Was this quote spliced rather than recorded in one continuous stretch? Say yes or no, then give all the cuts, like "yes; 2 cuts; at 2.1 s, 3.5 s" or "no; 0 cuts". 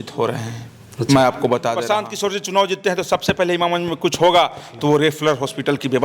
yes; 1 cut; at 1.9 s